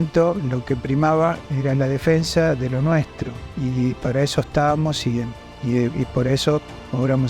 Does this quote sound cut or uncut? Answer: cut